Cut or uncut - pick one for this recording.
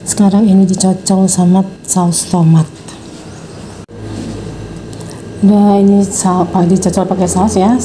cut